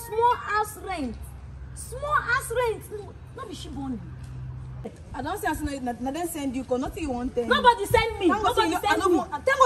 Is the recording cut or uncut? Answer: cut